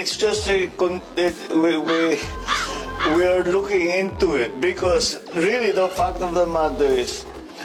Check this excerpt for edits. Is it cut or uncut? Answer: uncut